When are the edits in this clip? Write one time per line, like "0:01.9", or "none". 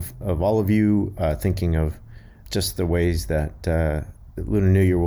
0:02.3